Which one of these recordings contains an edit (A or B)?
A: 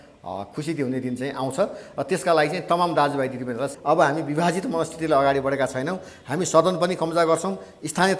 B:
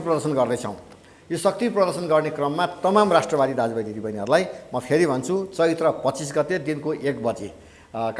A